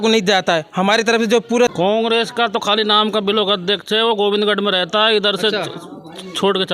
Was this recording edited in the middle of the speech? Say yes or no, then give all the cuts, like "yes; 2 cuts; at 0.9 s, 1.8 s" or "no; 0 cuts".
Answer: yes; 1 cut; at 1.7 s